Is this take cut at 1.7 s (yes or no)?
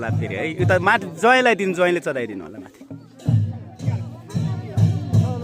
no